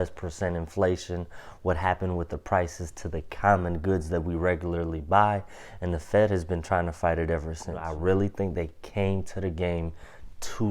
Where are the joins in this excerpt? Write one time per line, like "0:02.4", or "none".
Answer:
0:07.9